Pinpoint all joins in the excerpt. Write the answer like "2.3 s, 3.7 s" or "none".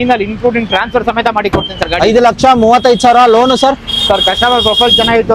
none

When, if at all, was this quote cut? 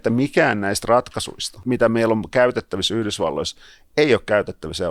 1.6 s

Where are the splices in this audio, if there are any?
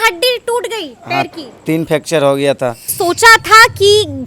2.9 s

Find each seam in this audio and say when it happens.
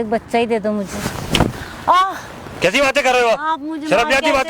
none

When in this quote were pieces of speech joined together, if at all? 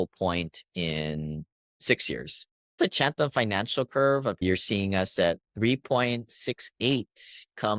2.8 s, 4.4 s

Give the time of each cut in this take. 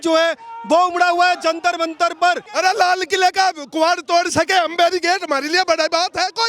2.5 s

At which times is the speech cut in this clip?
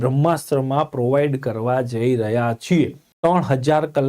3.0 s

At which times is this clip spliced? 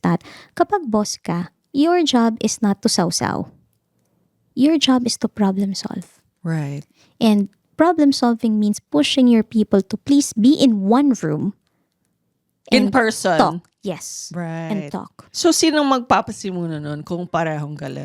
15.2 s

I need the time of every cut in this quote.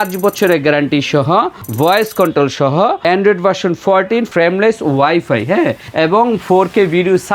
1.6 s, 3.0 s, 4.3 s, 5.8 s

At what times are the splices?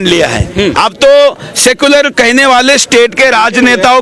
none

